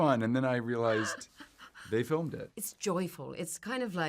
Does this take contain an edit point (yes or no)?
yes